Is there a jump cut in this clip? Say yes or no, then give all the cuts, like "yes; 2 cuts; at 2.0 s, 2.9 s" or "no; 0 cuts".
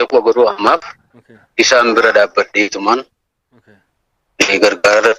no; 0 cuts